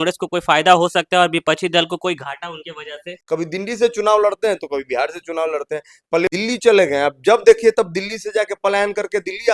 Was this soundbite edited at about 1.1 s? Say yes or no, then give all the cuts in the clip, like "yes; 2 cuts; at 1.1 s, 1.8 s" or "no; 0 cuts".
no; 2 cuts; at 3.1 s, 6.3 s